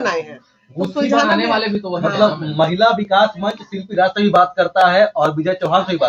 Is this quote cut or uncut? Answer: uncut